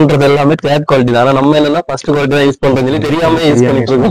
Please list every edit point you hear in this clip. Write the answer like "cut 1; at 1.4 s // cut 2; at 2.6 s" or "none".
none